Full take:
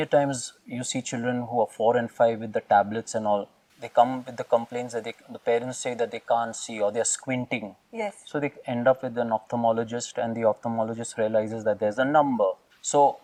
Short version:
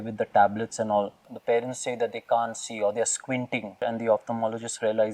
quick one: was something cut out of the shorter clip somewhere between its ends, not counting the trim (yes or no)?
yes